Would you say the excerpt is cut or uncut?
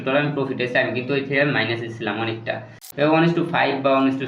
cut